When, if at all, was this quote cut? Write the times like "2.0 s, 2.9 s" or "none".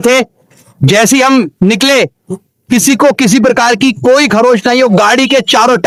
none